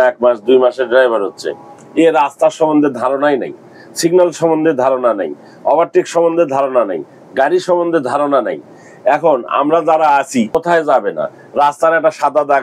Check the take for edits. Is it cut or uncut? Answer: cut